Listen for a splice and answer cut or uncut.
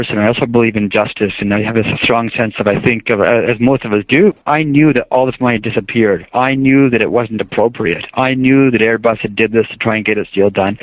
uncut